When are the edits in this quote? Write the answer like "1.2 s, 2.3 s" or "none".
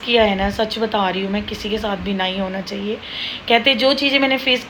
none